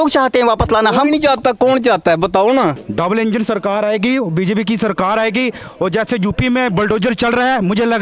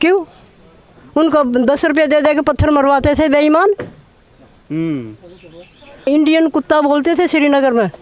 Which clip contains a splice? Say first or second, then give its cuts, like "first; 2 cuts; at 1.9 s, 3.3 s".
first; 1 cut; at 2.8 s